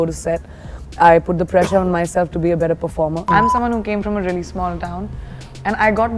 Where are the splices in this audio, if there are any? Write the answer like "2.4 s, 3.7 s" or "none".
3.3 s

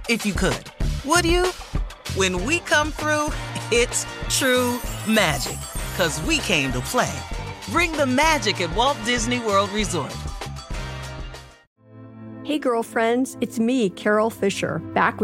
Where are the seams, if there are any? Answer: 11.6 s

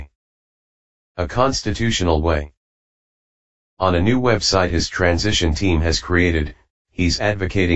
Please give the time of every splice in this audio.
4.3 s

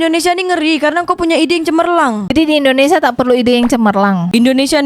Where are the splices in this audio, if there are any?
none

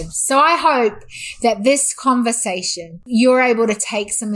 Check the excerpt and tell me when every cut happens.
3.0 s

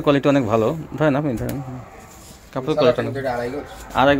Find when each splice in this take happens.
none

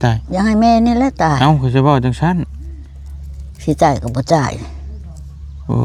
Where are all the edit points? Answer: none

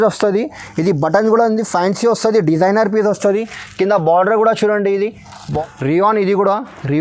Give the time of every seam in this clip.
5.5 s

